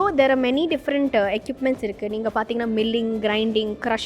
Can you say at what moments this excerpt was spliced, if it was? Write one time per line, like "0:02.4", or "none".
none